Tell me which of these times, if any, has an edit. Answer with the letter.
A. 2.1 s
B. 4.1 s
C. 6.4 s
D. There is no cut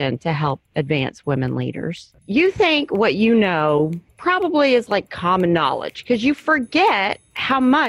A